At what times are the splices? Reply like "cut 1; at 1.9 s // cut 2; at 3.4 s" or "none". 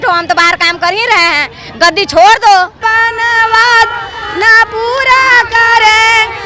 cut 1; at 2.8 s